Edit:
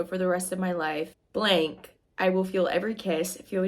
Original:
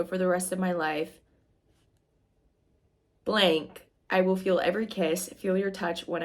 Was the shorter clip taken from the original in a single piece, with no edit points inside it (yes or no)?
no